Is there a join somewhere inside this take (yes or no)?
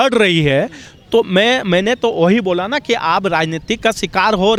no